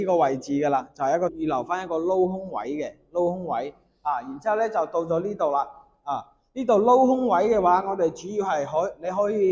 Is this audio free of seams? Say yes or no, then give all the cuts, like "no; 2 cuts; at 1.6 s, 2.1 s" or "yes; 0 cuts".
no; 1 cut; at 1.3 s